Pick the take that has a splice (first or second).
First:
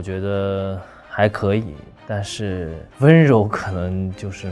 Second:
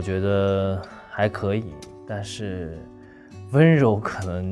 first